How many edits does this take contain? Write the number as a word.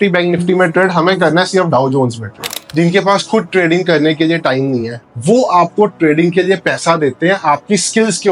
one